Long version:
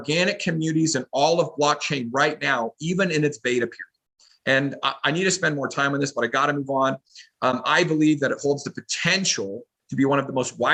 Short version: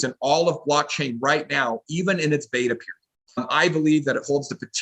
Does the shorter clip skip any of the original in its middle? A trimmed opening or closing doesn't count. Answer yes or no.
yes